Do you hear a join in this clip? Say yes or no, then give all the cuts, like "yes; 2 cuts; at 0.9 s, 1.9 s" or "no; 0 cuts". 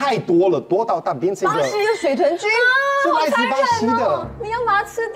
no; 0 cuts